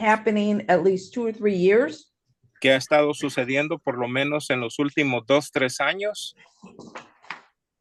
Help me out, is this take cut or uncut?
uncut